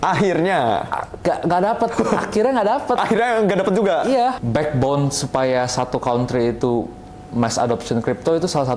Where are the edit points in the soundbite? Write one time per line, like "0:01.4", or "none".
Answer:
0:04.4